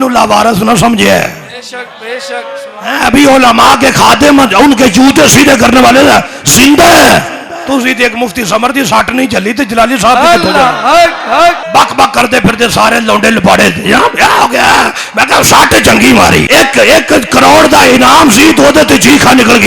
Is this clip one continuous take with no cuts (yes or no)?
no